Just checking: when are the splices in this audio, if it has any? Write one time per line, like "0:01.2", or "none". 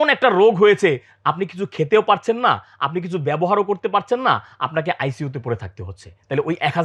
none